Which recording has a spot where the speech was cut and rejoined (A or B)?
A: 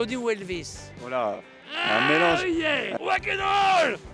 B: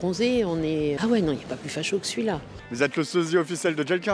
B